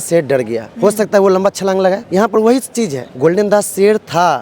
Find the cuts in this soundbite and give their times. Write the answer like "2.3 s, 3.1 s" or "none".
2.0 s, 3.0 s